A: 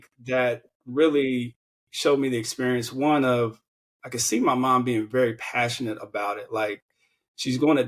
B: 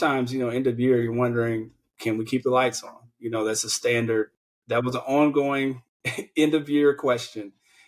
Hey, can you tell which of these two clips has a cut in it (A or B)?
B